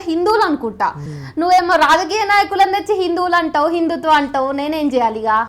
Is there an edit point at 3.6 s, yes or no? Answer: no